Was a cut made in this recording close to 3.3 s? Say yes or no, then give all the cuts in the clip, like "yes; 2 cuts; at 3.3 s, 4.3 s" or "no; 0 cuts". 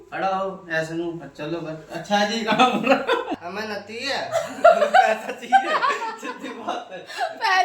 yes; 1 cut; at 3.3 s